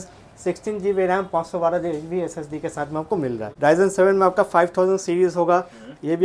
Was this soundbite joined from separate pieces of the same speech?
yes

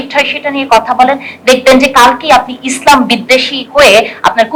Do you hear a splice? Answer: no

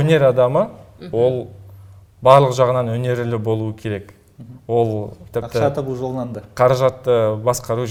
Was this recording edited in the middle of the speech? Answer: no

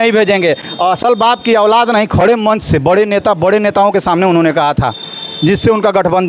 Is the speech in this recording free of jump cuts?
yes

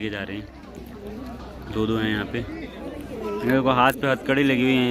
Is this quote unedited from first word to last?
no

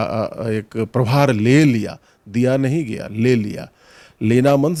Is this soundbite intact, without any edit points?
yes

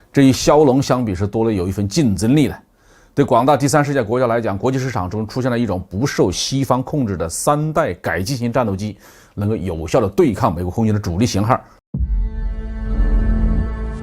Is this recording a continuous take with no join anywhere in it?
no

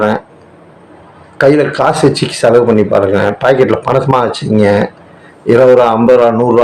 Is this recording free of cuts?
yes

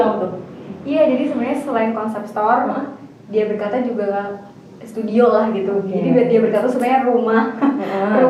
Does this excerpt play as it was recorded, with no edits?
yes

